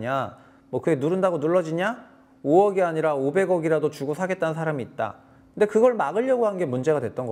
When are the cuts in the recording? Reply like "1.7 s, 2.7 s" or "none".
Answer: none